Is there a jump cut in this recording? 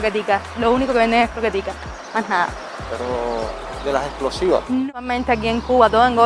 yes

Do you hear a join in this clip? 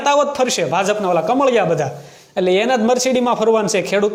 no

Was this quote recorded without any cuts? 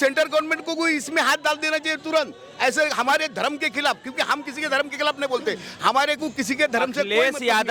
yes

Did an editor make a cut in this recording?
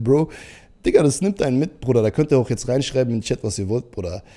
no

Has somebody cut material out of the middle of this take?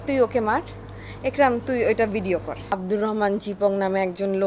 yes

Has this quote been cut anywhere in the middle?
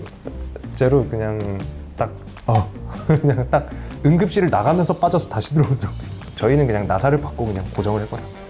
yes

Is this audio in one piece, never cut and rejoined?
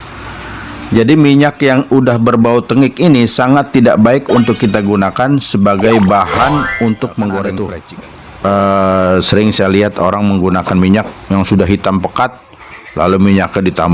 no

